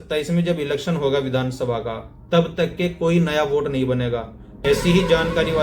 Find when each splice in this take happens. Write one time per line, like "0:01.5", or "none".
0:04.5